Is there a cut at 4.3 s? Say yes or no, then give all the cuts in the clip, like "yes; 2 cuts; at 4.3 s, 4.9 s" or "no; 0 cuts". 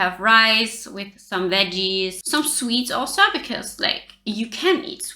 no; 1 cut; at 2.2 s